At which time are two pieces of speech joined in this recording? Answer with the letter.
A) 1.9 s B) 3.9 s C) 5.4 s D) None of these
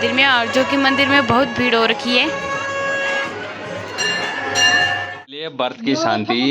C